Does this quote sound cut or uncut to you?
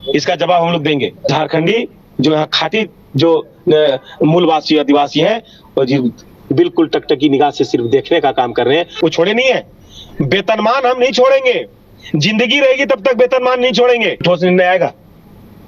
cut